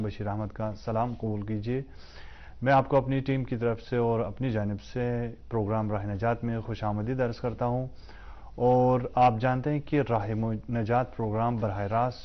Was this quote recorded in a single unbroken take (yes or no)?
yes